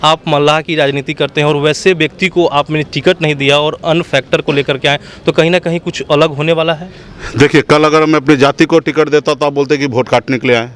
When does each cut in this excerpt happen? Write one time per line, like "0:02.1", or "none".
none